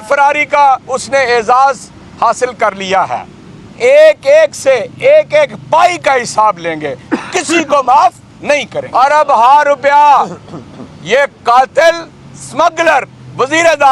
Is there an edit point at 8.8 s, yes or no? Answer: yes